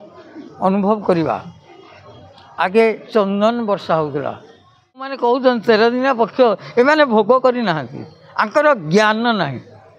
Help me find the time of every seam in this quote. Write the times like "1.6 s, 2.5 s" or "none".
5.2 s